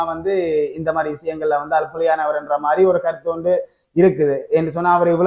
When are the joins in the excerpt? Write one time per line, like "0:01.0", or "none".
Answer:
none